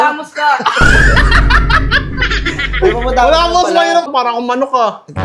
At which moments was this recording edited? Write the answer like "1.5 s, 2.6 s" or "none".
4.1 s